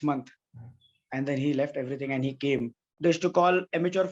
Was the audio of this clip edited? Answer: yes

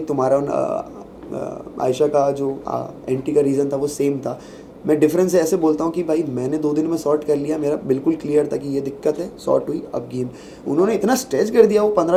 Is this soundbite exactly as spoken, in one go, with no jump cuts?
yes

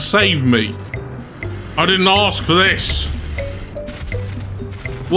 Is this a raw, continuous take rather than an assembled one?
yes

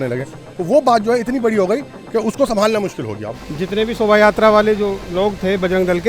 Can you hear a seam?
yes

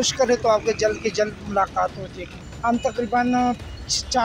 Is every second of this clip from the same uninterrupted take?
no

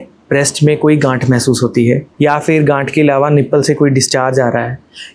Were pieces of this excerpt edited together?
yes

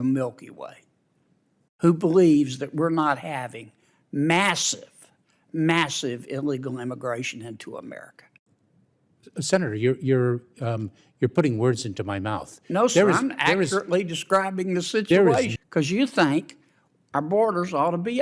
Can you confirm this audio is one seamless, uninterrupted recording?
no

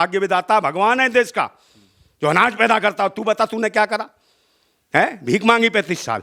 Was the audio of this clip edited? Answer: no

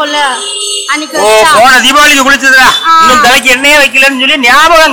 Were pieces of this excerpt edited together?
no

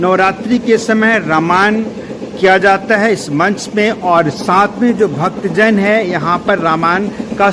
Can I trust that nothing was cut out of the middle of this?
yes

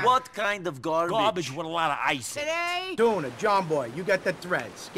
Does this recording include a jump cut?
yes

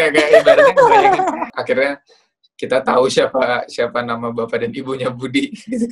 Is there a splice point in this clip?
yes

